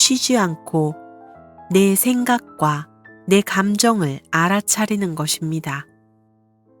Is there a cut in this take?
yes; 1 cut; at 5.8 s

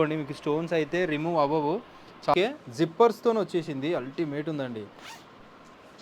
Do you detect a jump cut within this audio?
yes; 1 cut; at 2.3 s

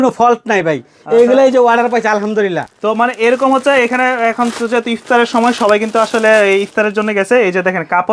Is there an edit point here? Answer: no; 0 cuts

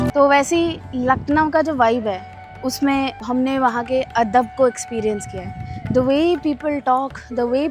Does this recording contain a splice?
yes; 1 cut; at 3.2 s

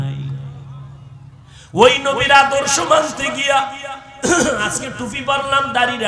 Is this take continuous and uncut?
yes; 0 cuts

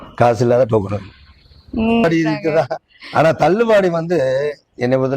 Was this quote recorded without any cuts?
no; 1 cut; at 2.0 s

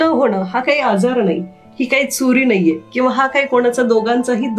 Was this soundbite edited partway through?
no; 0 cuts

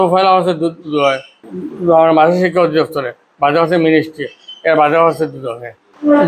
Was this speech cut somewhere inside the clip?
no; 0 cuts

